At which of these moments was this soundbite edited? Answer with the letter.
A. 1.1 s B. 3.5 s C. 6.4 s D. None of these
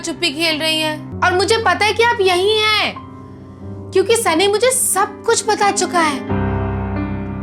A